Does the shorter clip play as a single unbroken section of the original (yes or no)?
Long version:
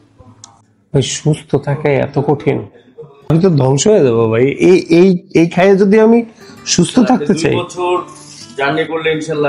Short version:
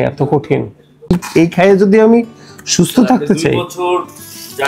no